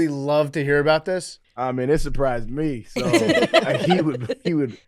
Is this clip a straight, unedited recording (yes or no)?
no